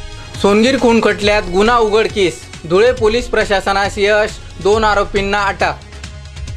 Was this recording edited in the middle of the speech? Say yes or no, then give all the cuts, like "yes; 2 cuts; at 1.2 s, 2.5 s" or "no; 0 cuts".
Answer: no; 0 cuts